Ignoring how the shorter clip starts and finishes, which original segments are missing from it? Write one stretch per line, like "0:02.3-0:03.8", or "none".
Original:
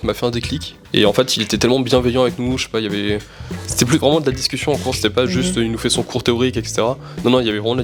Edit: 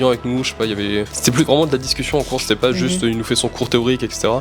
0:03.3-0:03.7